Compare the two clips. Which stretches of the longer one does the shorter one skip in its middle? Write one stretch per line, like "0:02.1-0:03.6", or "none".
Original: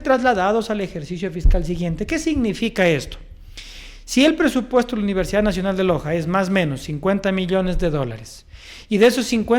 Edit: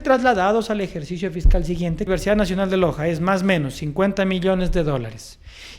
0:02.1-0:05.1

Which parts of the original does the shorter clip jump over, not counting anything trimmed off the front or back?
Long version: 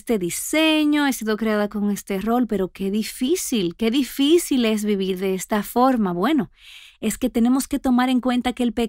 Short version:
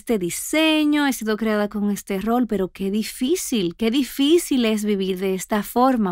none

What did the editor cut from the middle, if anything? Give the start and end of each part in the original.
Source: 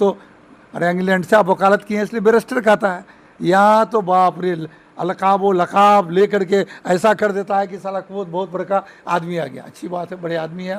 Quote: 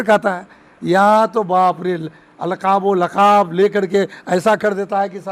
none

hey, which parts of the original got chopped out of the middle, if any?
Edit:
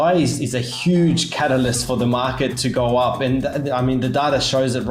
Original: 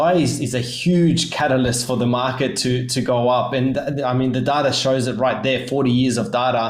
0:02.6-0:02.9

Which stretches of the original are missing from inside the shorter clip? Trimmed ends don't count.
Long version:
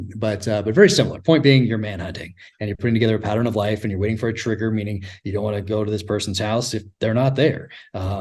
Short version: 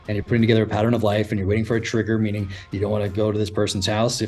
none

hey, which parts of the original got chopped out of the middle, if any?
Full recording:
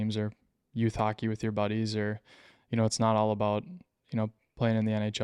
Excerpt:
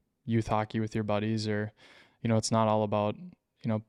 none

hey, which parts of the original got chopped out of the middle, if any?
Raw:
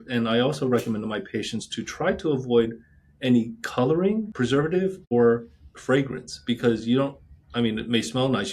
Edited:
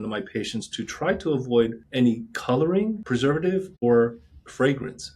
0:02.8-0:03.1

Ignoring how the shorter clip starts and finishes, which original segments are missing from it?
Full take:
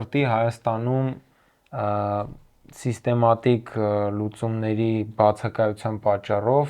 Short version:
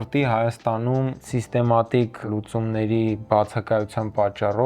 0:01.2-0:02.7
0:03.8-0:04.1

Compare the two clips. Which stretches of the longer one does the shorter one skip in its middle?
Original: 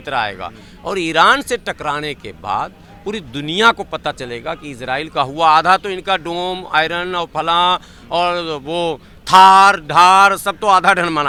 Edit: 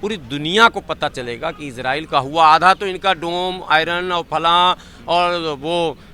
none

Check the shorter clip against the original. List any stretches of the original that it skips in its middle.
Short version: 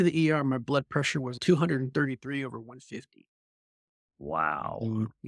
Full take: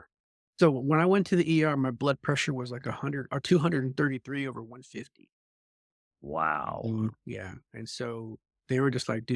0:02.7-0:03.4

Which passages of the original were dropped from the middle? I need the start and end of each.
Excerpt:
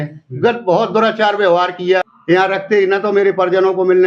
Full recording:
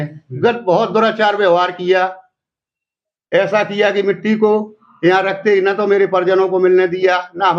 0:02.1-0:04.9

